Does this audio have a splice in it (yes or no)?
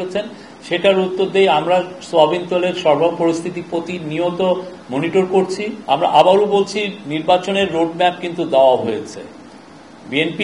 yes